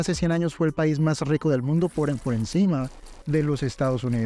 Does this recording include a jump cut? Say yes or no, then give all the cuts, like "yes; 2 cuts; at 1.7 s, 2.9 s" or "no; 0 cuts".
no; 0 cuts